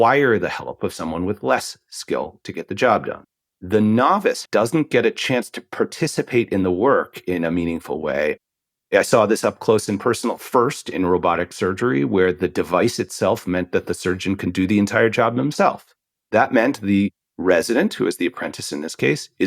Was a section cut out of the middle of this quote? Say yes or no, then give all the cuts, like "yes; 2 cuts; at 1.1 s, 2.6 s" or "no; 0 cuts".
yes; 4 cuts; at 3.2 s, 4.4 s, 8.4 s, 16.3 s